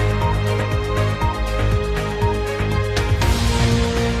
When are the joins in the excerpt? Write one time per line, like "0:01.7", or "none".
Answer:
0:03.0